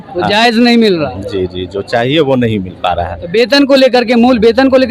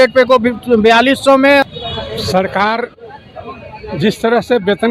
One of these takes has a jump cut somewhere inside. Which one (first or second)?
second